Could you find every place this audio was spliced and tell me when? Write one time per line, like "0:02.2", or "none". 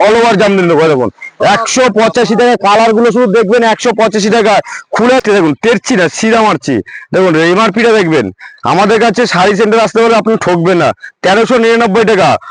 0:05.2